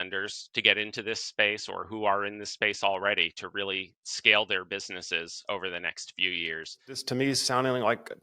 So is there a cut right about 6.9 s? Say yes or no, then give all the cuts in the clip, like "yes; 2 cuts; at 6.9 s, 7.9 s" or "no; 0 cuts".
yes; 1 cut; at 6.9 s